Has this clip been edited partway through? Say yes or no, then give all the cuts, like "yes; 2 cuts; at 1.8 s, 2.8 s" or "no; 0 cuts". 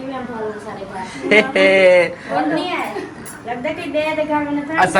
no; 0 cuts